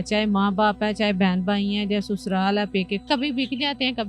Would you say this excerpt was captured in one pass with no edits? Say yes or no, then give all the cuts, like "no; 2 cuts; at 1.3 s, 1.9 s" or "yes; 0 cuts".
no; 1 cut; at 3.0 s